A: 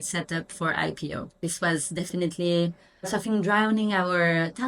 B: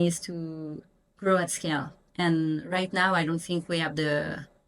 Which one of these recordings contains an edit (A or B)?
A